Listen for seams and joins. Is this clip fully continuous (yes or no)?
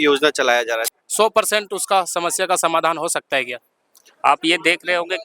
no